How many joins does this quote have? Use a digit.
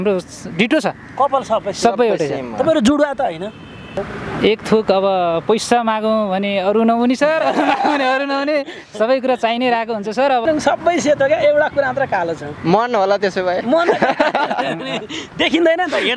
2